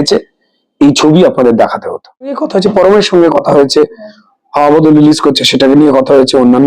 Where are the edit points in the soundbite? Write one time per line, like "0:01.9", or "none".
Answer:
0:02.4